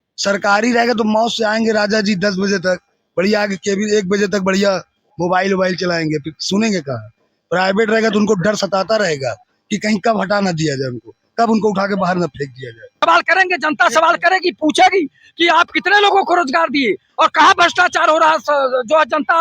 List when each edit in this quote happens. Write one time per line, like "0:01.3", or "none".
0:13.0